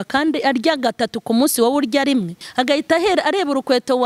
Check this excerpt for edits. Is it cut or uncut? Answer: cut